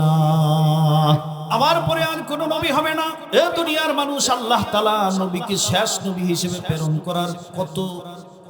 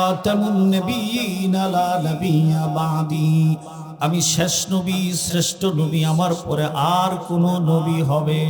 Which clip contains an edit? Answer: first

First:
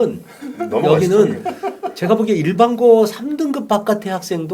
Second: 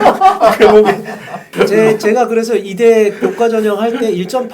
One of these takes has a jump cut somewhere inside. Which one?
second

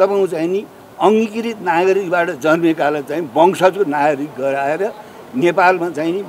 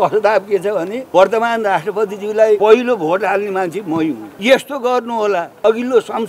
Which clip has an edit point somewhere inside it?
second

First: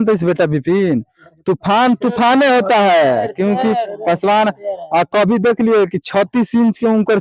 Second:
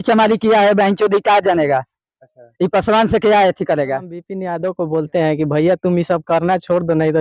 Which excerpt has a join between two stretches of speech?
second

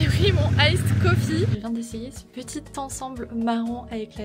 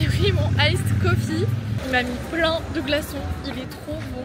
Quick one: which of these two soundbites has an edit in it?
first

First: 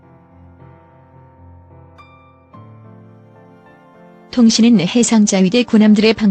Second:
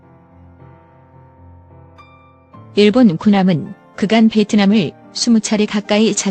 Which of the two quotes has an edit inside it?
second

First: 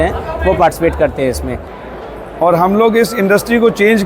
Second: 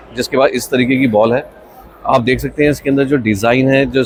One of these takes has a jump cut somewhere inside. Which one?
first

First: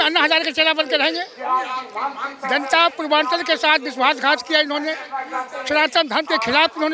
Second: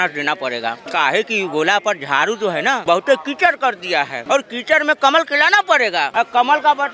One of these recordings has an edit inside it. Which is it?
second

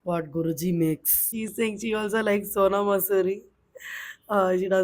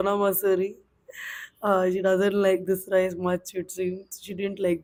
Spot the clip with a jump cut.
first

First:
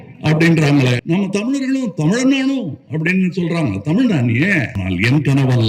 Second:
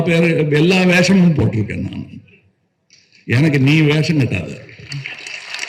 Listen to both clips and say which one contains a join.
first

